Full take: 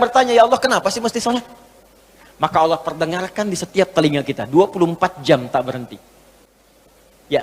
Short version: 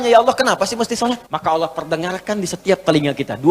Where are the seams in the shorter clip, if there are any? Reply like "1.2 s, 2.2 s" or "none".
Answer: 1.3 s

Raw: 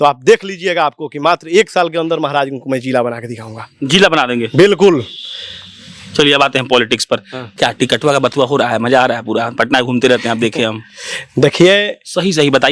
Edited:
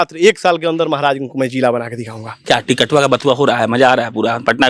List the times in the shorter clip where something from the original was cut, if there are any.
2.3 s

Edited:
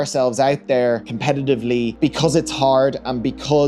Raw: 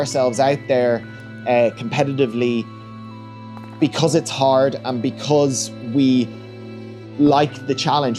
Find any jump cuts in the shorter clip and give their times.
1.1 s, 2.0 s

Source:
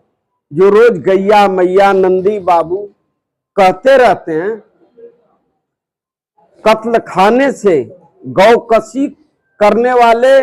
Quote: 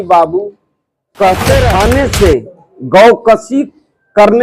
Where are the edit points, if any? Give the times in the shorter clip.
1.7 s

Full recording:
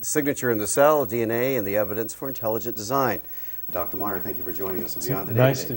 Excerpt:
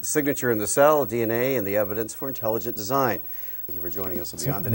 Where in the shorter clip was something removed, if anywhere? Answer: 3.7 s

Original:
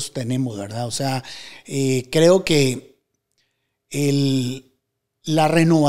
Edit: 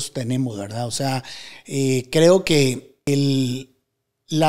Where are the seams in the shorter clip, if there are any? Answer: 3.1 s

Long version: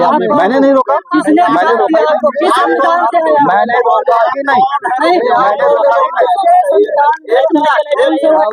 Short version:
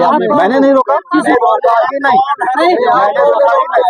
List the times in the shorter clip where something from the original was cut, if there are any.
1.3 s

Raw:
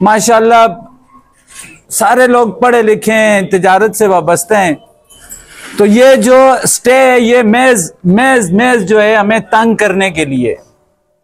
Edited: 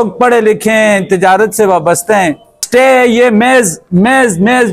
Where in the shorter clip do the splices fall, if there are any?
2.6 s

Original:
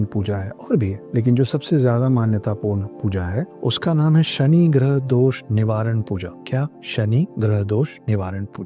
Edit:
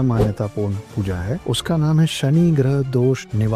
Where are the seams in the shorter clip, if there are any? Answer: 1.4 s

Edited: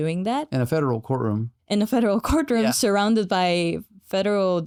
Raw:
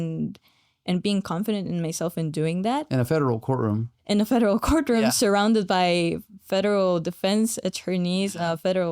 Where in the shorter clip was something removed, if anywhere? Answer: none

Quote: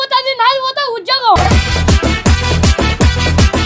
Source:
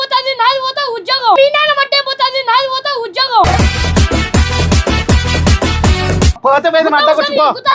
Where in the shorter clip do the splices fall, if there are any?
1.3 s

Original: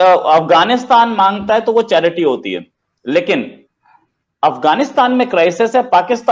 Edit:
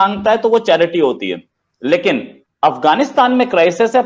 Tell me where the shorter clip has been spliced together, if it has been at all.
2.4 s

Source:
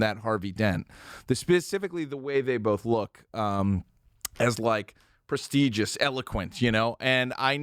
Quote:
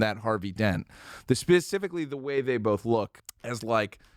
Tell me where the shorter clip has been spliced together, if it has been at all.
3.2 s

